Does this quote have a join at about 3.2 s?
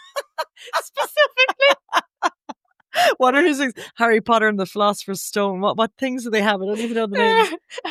no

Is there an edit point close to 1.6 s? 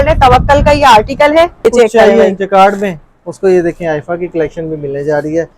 yes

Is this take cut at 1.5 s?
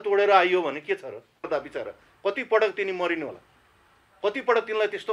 yes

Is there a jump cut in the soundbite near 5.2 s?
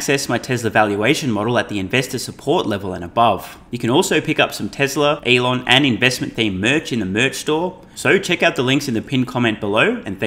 yes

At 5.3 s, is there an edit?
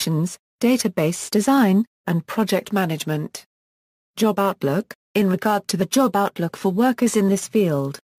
no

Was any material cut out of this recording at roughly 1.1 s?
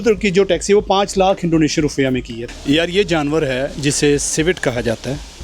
no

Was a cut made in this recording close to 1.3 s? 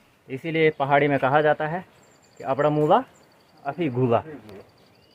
no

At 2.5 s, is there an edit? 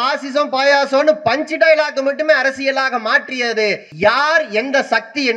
no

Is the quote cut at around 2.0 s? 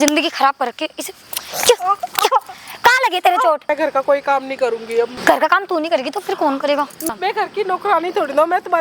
no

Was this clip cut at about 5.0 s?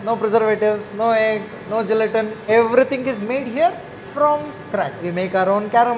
yes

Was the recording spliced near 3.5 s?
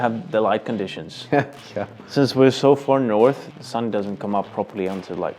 yes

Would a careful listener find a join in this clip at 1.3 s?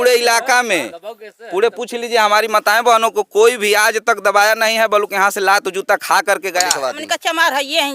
no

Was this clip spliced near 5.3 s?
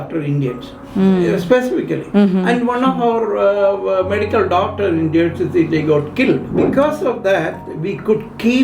no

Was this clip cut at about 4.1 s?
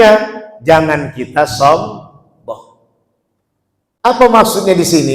yes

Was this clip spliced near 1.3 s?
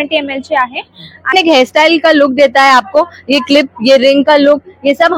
yes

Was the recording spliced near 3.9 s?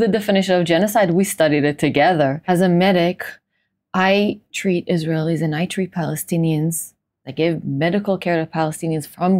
no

